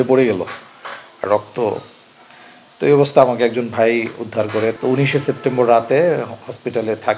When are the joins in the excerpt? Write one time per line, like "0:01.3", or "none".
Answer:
0:04.7